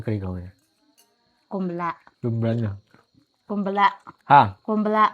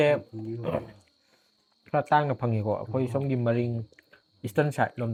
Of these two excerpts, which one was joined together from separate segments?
first; 1 cut; at 2.1 s

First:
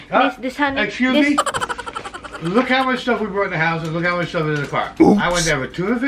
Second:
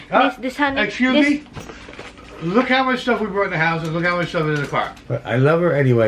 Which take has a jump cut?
second; 1 cut; at 4.9 s

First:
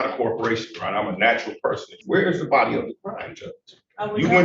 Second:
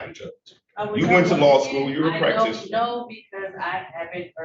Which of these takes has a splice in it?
first; 1 cut; at 2.0 s

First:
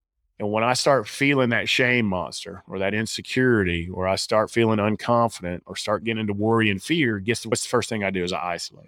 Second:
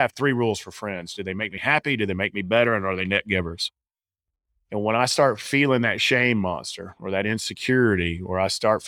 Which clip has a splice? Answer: first; 1 cut; at 7.5 s

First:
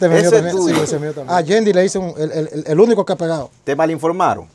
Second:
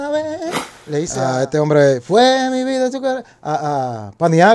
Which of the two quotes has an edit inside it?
first; 1 cut; at 1.1 s

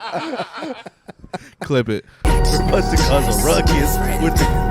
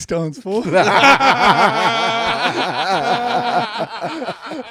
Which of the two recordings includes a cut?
first; 1 cut; at 2.1 s

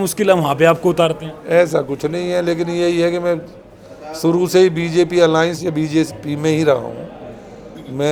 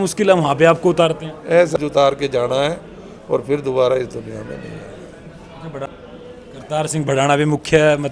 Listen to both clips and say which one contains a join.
second; 2 cuts; at 1.8 s, 5.9 s

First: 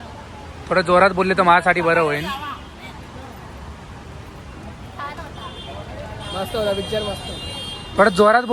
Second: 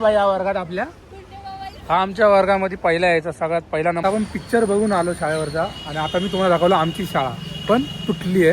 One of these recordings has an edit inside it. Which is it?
second; 1 cut; at 4.0 s

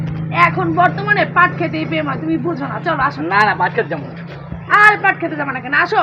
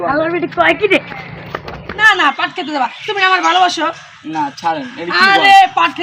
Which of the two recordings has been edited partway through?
second; 1 cut; at 2.0 s

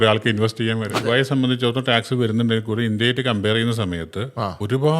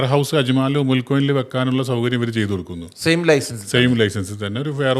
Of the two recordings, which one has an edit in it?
first; 1 cut; at 1.0 s

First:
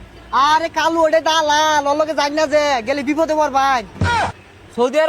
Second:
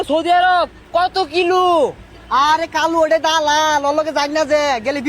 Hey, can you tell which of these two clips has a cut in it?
first; 1 cut; at 4.0 s

